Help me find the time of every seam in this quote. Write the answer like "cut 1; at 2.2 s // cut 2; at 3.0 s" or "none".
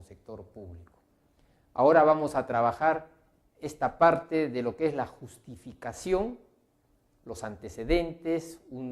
none